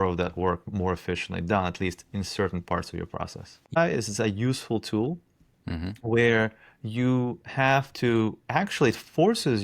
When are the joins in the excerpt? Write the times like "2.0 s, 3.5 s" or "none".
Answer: 3.8 s